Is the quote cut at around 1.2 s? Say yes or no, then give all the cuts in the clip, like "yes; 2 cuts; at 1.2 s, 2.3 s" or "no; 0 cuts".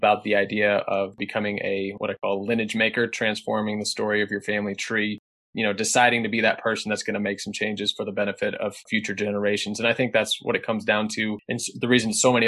yes; 1 cut; at 1.2 s